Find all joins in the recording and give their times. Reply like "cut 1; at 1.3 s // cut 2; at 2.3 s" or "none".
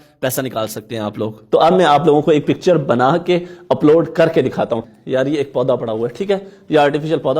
cut 1; at 1.4 s // cut 2; at 4.8 s